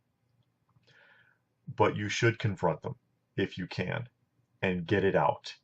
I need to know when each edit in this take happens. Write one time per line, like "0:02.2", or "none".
0:04.4